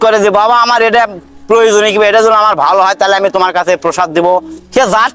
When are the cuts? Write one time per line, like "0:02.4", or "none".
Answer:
none